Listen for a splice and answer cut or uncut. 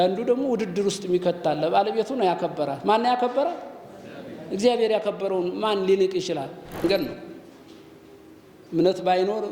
cut